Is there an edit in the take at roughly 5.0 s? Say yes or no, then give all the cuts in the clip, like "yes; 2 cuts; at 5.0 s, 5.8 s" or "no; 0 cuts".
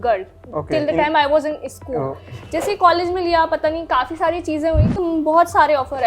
yes; 1 cut; at 5.0 s